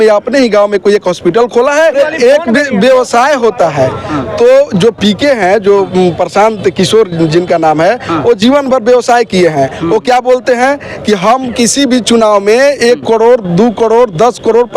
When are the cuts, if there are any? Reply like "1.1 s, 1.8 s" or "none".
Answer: 1.9 s